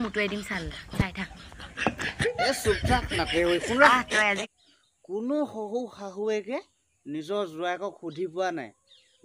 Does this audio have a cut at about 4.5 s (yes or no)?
yes